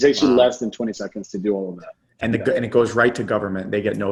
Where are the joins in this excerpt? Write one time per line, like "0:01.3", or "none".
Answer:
none